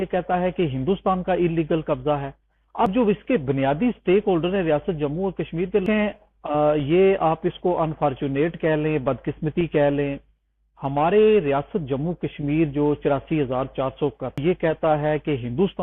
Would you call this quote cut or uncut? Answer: cut